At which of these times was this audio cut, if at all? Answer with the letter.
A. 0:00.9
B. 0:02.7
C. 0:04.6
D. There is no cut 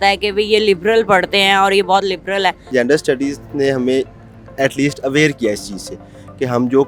B